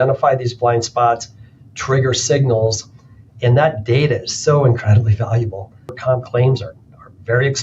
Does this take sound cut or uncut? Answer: cut